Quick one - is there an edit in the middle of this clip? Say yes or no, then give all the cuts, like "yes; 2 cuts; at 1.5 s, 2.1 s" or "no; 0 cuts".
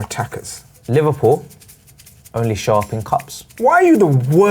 yes; 1 cut; at 3.4 s